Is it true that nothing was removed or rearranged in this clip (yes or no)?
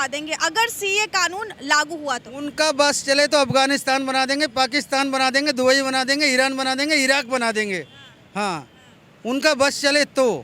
yes